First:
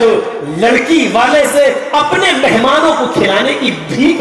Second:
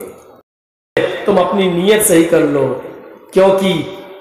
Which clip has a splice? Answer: second; 1 cut; at 1.0 s

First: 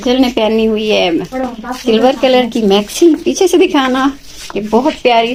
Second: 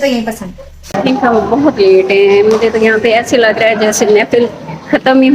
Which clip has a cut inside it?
second; 1 cut; at 0.9 s

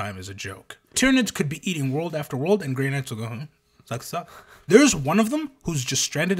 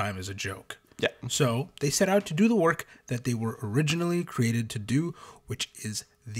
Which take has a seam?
first; 2 cuts; at 1.0 s, 4.5 s

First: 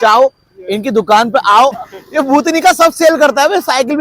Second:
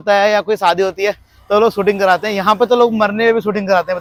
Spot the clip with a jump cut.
first; 1 cut; at 1.8 s

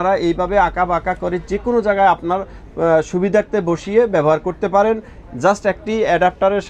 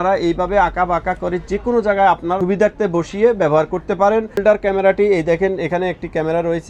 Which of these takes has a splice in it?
second; 2 cuts; at 2.4 s, 4.4 s

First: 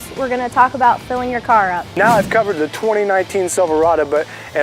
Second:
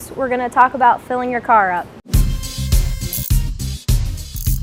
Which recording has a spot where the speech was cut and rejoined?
first; 1 cut; at 1.9 s

